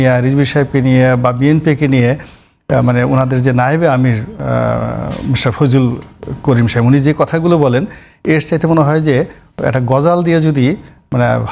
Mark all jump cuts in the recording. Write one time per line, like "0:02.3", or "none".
none

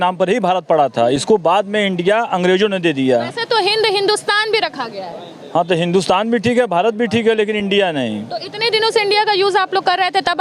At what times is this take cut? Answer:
none

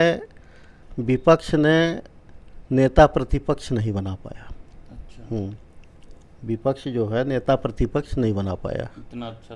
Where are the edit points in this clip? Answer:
none

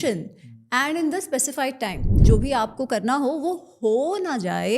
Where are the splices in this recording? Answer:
0:02.3

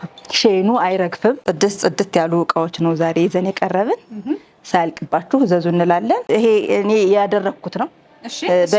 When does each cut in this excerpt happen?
0:01.4
0:06.2

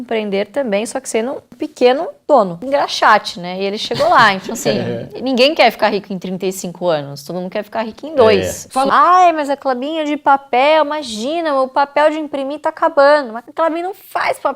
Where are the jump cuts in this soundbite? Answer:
0:02.6
0:08.6

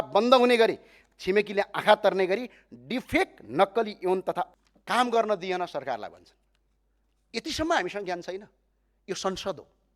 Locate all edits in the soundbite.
0:04.5

